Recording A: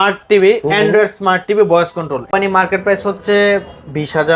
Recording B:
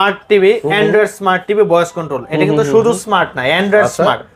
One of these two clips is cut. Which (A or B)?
A